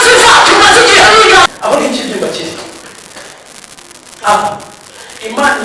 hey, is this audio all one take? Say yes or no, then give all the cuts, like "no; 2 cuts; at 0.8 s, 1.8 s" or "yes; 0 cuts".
no; 1 cut; at 1.5 s